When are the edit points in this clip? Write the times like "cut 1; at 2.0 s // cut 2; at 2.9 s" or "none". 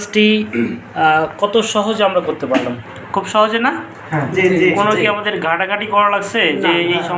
cut 1; at 2.9 s